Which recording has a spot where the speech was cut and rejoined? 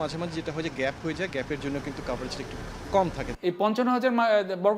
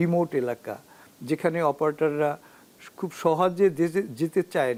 first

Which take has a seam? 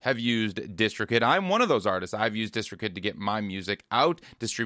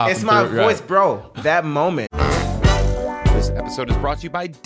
second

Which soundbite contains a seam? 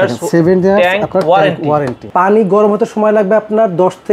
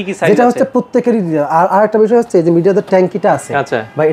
first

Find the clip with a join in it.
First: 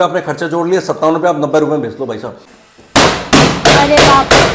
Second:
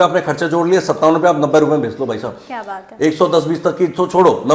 first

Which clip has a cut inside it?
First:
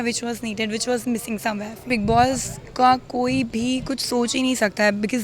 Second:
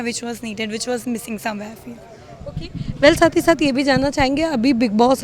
first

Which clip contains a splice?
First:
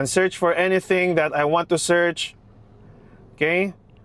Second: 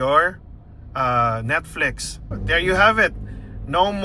second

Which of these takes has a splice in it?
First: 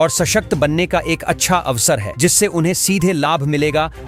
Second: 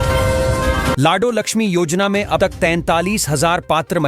second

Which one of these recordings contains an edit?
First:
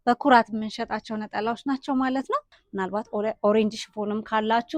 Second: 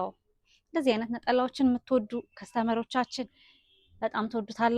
first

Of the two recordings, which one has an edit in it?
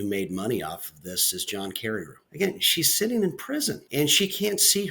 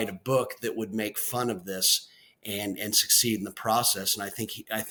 first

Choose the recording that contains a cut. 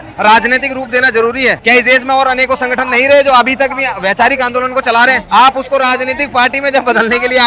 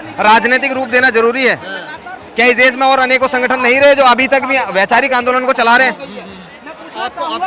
first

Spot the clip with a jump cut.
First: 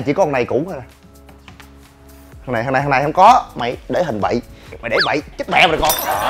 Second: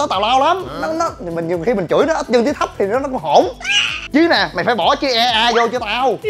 first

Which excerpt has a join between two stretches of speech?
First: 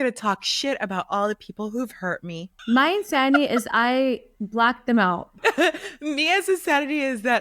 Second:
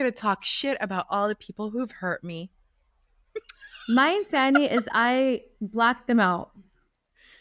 first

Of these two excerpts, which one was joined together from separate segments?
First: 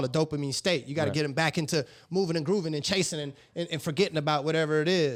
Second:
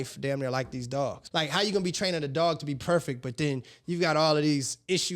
second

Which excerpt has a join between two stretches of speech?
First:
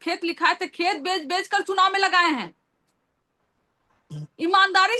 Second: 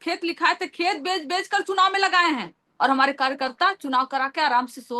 second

